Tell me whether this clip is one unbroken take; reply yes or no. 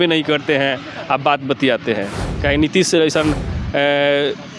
no